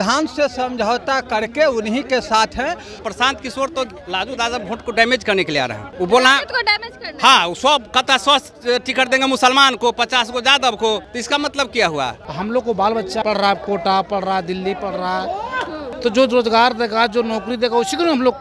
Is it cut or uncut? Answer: cut